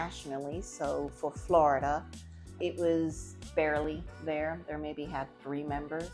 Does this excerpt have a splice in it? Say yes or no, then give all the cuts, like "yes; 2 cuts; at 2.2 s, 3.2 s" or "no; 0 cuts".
yes; 2 cuts; at 2.6 s, 3.5 s